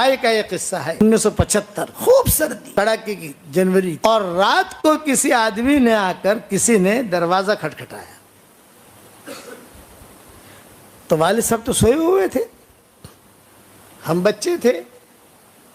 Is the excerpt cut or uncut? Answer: cut